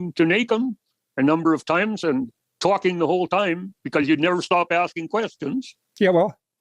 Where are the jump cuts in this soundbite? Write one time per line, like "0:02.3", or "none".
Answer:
none

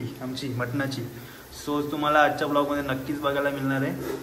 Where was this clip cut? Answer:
none

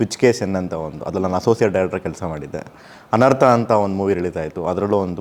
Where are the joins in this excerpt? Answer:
none

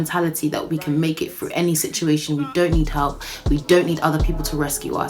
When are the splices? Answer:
none

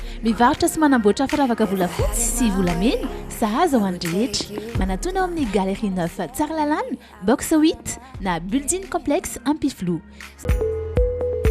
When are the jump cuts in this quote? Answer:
0:10.5

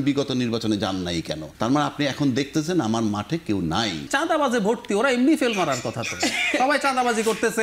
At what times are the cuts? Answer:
0:01.4
0:04.1

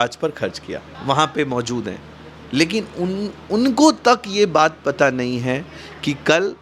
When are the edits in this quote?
0:01.0

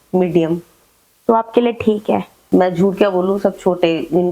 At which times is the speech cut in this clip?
0:02.3

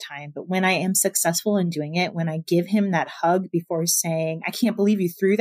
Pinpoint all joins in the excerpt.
none

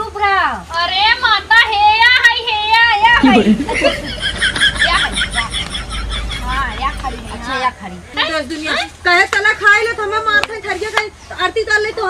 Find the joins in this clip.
0:08.1

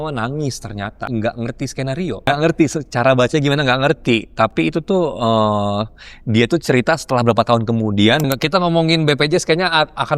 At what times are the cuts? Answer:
0:01.0
0:02.3
0:08.2

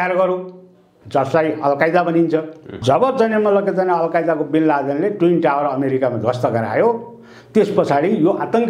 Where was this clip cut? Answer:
0:02.7

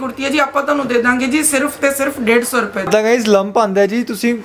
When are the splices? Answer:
0:02.9

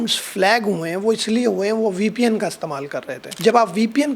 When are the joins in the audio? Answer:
0:03.2

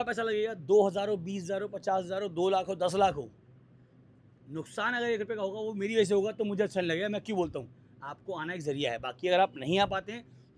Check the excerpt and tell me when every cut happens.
none

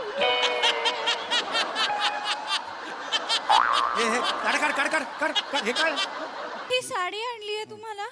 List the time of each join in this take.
0:06.7

